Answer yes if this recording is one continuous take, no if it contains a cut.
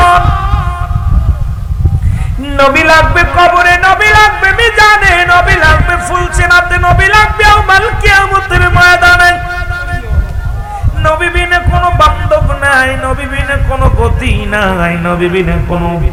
yes